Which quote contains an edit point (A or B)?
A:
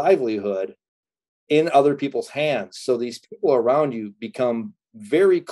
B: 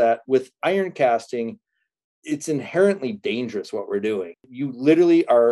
B